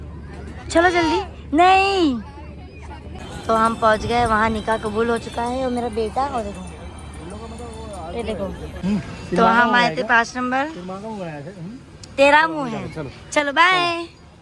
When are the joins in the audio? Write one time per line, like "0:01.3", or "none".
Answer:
0:03.1
0:08.8